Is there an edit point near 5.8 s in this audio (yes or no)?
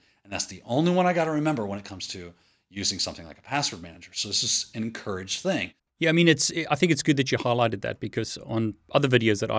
yes